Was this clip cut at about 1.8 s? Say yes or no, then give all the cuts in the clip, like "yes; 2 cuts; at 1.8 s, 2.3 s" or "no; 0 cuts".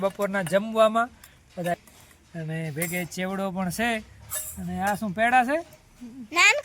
yes; 1 cut; at 1.8 s